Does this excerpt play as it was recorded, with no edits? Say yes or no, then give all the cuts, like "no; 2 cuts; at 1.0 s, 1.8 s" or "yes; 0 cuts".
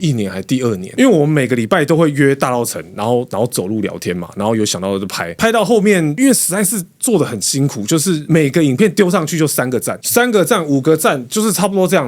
no; 1 cut; at 5.2 s